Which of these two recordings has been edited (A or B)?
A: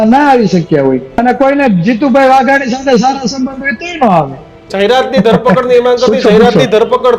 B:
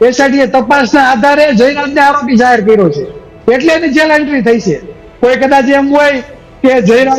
A